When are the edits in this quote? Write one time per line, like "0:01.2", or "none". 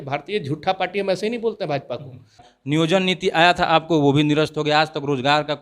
0:02.5

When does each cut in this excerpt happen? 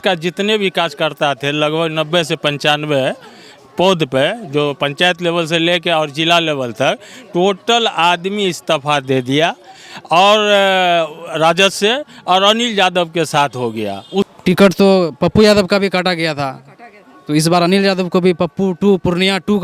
0:14.3

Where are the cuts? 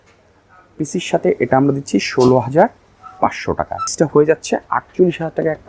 0:03.9

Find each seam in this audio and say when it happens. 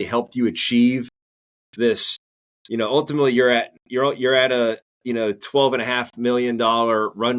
none

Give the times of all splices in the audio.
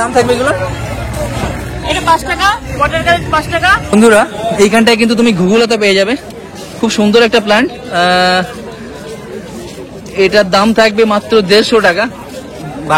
0:03.9

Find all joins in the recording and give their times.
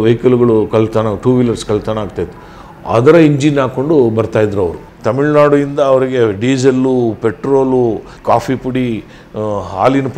0:04.9
0:08.1

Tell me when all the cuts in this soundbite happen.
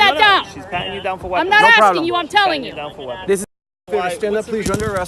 0:03.4

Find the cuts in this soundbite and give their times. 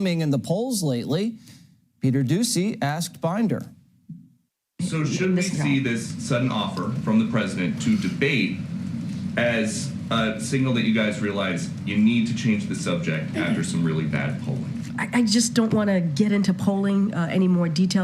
none

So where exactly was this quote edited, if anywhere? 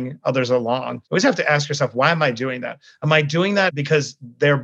0:01.0
0:03.7

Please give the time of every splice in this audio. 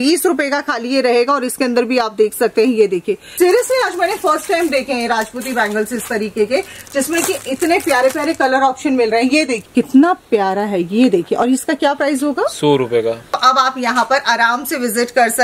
0:03.2
0:09.6
0:13.3

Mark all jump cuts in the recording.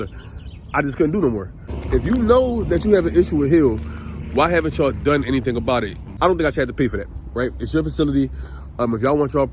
0:01.8
0:06.0

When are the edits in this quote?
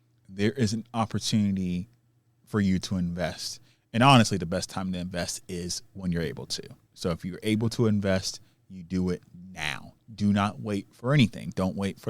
none

